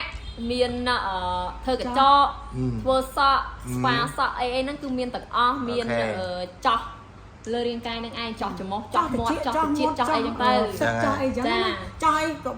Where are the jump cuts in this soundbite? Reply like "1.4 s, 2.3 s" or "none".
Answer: none